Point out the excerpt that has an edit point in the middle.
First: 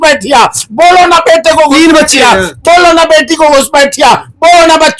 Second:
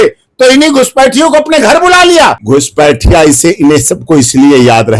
second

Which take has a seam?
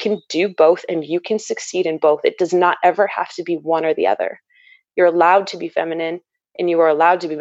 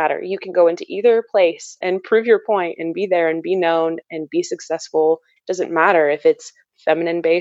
second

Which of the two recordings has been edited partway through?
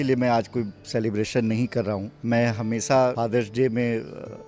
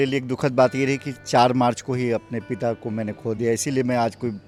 first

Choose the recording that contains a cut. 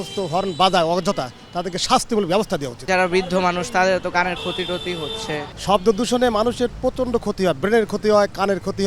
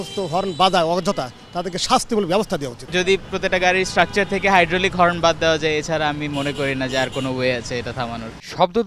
first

